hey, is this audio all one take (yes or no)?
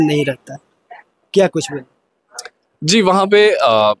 yes